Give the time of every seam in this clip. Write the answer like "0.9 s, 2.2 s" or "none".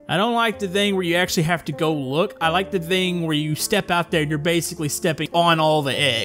5.3 s